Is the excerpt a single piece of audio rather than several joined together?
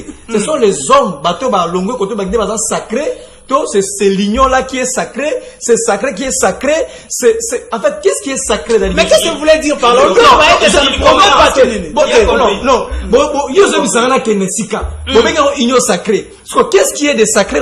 yes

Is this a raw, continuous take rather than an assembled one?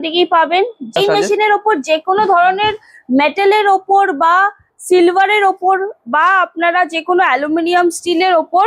no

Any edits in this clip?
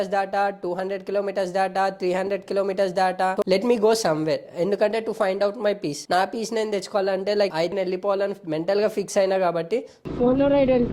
yes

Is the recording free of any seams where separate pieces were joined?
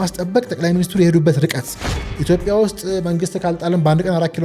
no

